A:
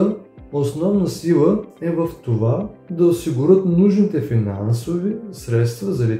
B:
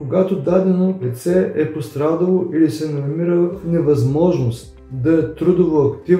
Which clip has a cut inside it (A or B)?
B